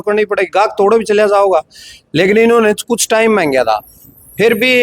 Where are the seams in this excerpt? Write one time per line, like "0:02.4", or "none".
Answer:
none